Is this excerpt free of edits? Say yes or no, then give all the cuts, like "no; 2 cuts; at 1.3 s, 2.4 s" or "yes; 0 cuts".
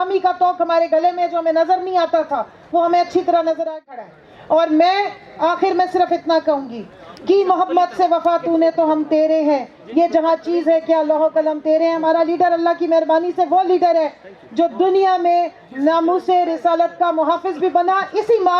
yes; 0 cuts